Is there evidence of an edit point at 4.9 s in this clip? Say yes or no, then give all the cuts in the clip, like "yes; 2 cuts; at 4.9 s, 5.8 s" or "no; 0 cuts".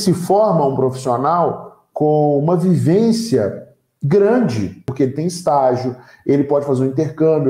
yes; 1 cut; at 4.9 s